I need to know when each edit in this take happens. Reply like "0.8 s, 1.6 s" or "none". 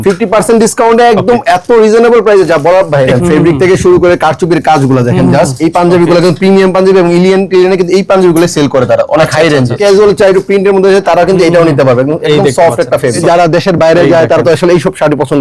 3.1 s, 9.8 s, 13.2 s